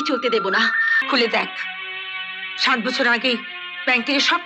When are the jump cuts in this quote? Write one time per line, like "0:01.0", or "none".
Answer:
0:01.0